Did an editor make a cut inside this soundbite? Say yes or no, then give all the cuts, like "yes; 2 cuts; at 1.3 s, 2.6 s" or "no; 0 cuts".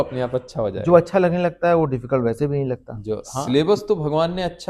yes; 1 cut; at 3.3 s